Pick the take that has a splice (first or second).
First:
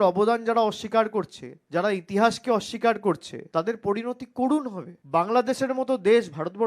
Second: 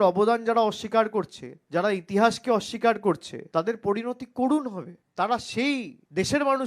first